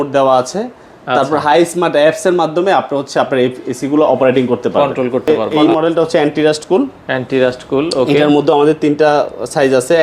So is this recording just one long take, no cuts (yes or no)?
no